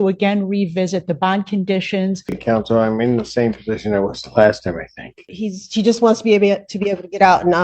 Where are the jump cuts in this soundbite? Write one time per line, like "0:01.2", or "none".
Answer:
0:02.4
0:05.3